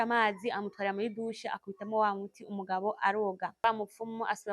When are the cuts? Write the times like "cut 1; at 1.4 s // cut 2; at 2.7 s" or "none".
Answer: cut 1; at 3.6 s